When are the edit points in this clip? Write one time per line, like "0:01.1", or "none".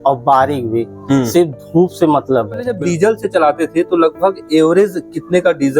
0:02.7